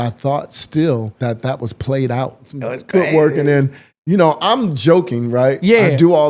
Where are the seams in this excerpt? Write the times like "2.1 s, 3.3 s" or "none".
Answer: 1.1 s, 2.5 s